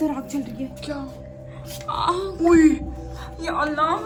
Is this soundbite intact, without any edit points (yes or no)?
yes